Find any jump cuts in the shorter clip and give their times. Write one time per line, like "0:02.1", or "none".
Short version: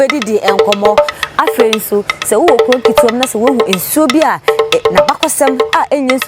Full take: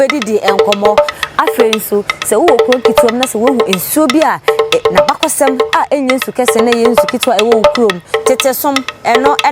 none